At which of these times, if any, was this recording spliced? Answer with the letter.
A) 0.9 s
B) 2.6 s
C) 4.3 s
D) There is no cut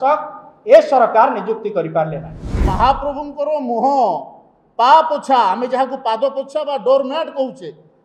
B